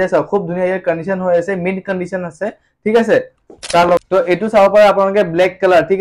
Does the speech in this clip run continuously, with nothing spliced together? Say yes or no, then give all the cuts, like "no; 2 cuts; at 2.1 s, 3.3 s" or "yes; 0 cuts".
no; 1 cut; at 4.0 s